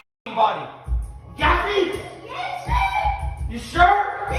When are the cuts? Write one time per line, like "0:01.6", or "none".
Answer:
none